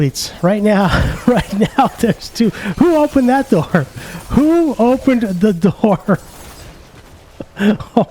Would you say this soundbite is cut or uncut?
uncut